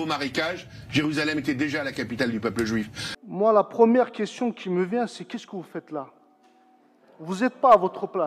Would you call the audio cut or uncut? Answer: cut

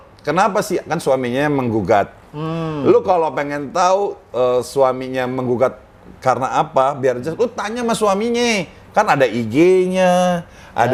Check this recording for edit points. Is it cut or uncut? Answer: uncut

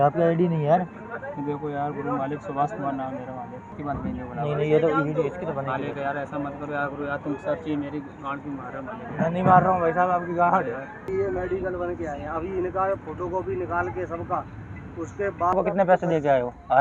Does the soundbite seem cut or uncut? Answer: cut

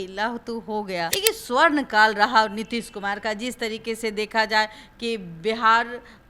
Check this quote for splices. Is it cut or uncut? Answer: cut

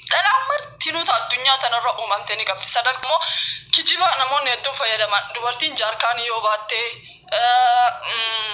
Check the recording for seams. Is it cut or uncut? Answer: cut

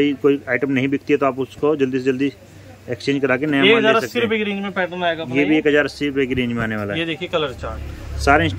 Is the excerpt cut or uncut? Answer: uncut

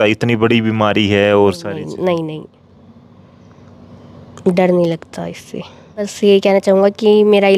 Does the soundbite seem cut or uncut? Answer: cut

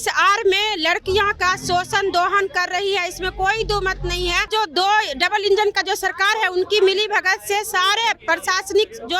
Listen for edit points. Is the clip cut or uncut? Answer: cut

